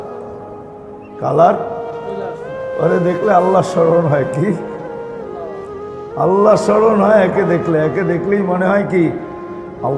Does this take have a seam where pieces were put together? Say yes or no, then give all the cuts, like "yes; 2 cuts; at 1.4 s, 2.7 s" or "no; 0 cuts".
no; 0 cuts